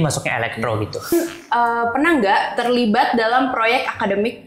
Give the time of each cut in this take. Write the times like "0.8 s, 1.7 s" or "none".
1.1 s